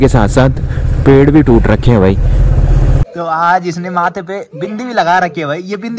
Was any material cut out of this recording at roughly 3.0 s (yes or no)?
yes